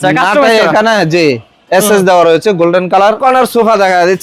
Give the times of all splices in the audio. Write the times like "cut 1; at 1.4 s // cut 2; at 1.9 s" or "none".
cut 1; at 3.2 s